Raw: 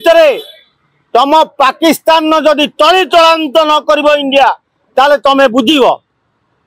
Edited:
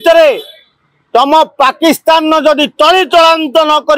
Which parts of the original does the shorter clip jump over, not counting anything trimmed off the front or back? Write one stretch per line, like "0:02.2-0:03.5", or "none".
none